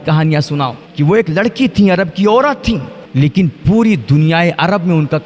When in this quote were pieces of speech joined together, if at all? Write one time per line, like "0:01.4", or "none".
0:00.8
0:03.0